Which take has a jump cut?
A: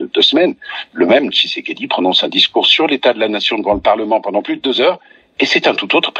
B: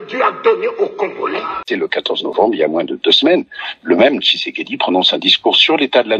B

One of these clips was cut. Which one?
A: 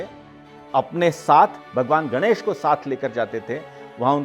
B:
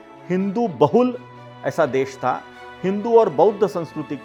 A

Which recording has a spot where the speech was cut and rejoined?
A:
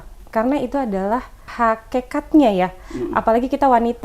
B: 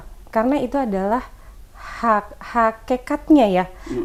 A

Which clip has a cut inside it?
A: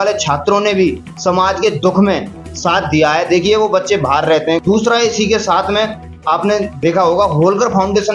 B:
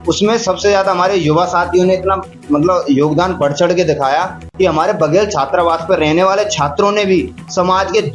A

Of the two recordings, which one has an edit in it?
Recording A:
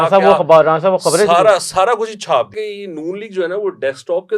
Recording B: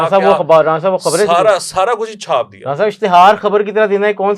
A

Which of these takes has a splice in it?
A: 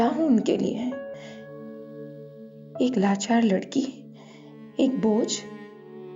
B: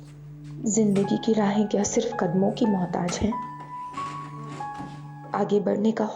A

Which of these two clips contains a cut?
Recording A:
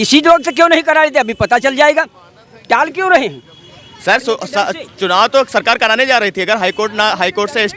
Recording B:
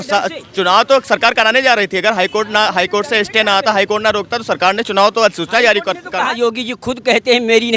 B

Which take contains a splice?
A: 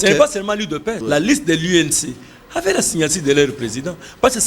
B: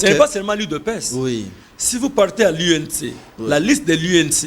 A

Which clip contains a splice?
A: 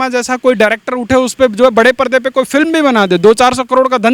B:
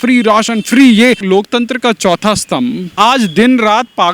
B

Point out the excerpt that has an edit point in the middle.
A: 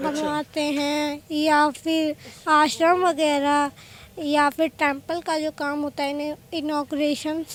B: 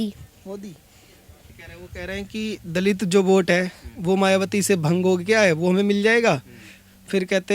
B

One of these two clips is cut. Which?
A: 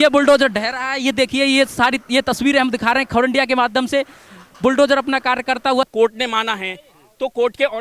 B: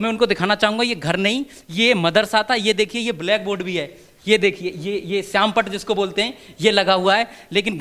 A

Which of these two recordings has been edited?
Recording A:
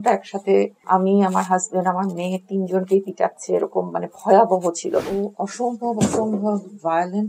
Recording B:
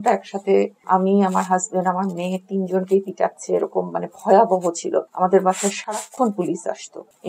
A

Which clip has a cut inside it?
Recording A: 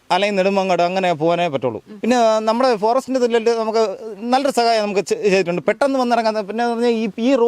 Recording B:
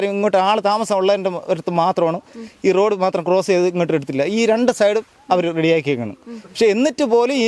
A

